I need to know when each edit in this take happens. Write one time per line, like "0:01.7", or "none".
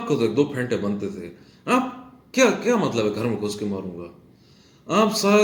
none